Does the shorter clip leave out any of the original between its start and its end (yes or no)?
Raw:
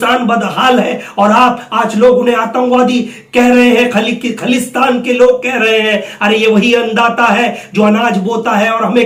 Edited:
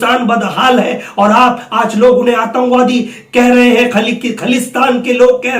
no